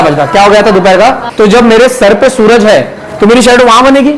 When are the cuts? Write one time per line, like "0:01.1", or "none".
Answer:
0:01.2